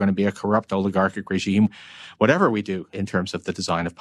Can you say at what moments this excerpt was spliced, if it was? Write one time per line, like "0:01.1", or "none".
0:01.7
0:02.9